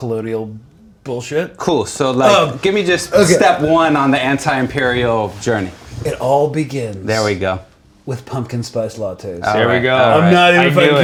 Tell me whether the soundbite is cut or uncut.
uncut